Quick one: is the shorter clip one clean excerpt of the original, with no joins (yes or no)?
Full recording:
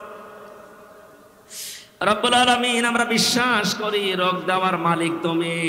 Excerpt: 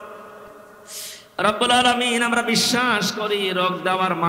no